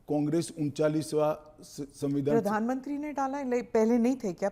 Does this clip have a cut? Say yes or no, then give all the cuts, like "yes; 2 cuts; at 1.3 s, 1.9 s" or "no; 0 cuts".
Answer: no; 0 cuts